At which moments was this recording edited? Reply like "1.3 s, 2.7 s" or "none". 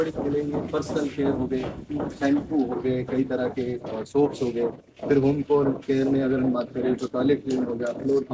none